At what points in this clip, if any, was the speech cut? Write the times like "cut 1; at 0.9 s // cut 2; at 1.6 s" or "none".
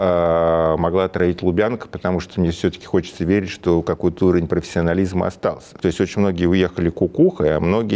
cut 1; at 5.7 s